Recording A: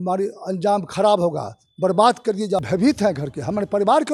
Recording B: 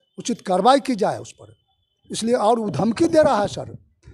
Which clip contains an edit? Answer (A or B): A